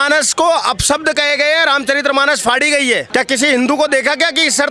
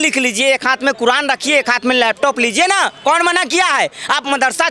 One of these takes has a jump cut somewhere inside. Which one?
first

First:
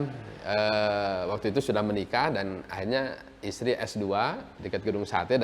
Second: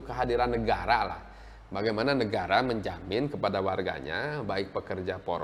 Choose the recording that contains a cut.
first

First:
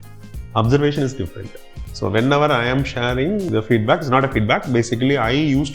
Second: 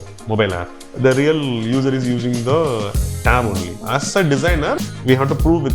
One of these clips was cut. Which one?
second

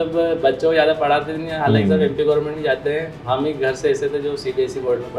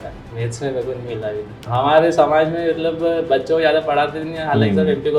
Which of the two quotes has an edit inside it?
second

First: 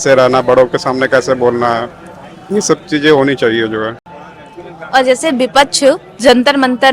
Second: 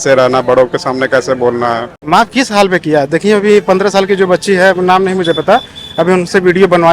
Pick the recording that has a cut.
second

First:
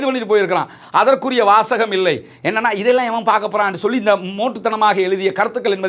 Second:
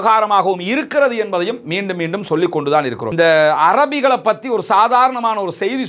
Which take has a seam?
second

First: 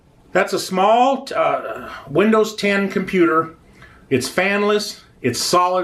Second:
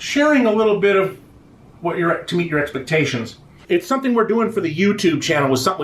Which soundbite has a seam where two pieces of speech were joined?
second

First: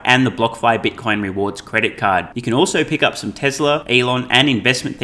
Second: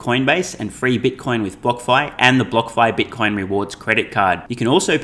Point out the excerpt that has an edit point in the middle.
first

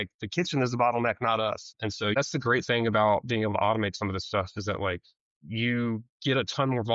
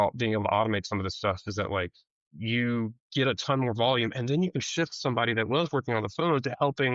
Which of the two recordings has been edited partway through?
first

